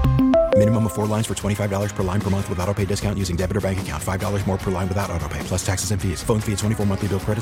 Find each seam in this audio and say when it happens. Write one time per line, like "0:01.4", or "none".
none